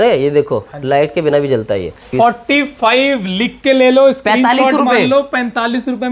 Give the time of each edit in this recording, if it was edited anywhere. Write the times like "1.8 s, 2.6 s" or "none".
2.0 s